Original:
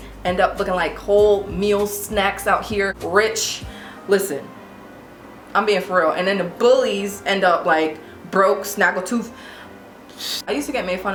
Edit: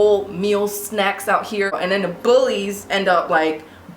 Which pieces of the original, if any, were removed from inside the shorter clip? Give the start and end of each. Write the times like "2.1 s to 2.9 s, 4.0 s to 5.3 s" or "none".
3.0 s to 6.1 s